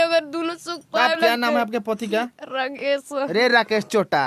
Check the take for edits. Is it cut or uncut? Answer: cut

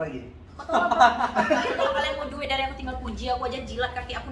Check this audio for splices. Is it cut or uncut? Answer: cut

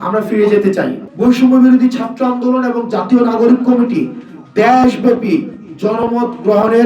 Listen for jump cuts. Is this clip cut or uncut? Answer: cut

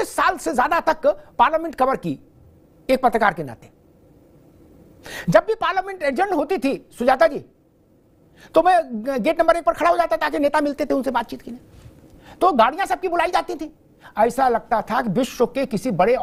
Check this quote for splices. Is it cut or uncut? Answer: uncut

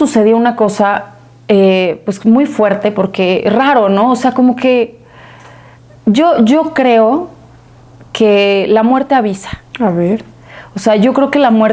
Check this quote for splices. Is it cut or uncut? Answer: uncut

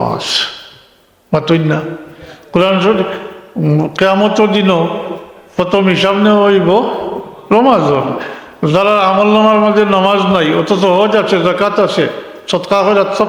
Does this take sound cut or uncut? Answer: uncut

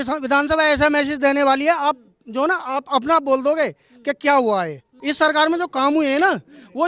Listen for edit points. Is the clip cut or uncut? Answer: cut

